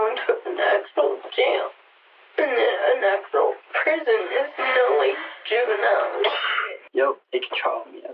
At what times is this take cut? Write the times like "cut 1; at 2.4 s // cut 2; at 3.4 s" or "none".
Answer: none